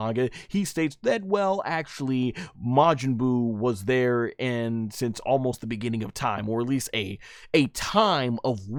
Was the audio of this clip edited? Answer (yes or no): no